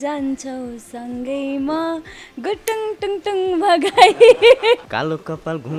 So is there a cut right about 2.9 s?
no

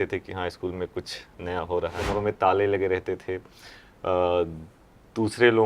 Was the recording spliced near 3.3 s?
no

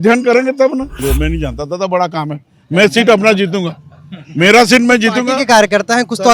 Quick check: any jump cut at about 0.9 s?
yes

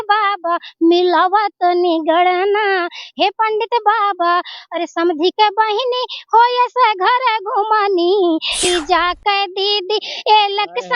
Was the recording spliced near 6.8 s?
no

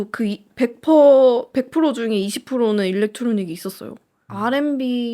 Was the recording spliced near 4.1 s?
yes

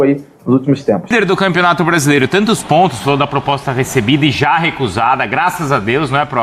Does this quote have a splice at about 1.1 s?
yes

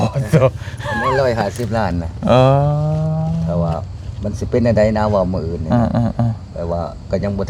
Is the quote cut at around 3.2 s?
no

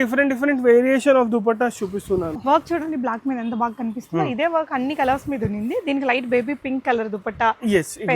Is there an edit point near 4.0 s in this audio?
no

